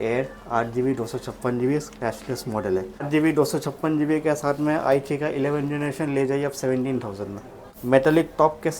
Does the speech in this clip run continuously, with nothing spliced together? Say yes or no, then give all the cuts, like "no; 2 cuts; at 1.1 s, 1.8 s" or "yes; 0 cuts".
no; 2 cuts; at 3.1 s, 7.7 s